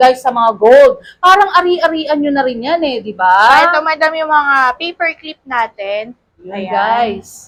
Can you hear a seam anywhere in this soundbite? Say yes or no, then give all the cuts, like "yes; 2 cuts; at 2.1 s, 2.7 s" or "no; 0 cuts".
no; 0 cuts